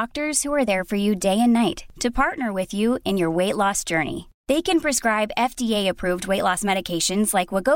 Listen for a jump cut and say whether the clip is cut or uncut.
uncut